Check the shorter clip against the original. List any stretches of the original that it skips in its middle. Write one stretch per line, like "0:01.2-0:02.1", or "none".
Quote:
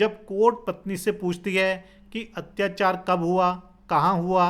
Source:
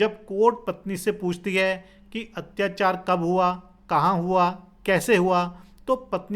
none